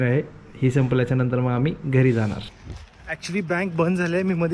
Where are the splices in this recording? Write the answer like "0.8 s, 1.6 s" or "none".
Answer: 2.6 s